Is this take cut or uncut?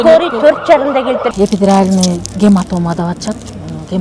cut